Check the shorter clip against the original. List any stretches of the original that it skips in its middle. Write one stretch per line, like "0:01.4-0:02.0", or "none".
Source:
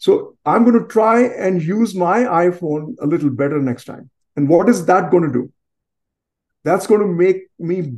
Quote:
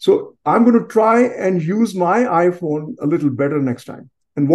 none